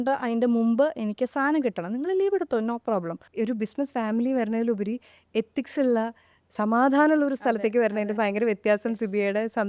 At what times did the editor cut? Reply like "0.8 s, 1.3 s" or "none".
3.2 s